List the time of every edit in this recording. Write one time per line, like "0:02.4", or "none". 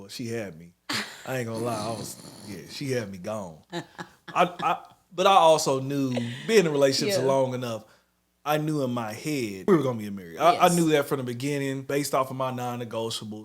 0:09.7
0:11.8

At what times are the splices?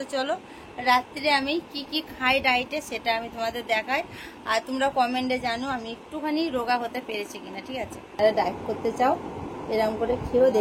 0:08.2

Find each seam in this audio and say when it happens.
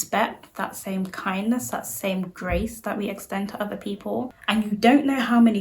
0:04.4

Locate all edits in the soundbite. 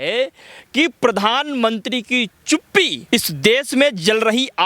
0:03.0

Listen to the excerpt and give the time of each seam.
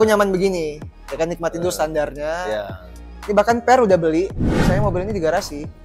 0:04.5

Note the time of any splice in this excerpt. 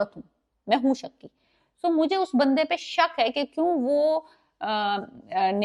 none

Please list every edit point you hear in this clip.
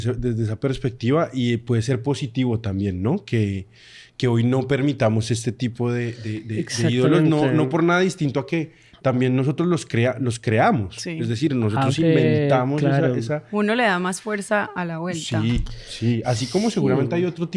none

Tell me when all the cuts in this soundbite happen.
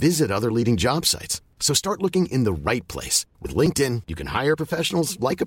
none

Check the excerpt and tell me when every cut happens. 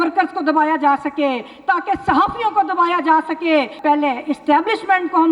0:03.7

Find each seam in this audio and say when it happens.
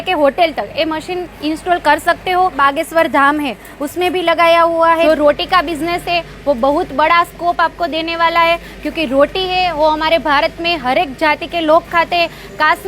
0:02.6
0:05.0

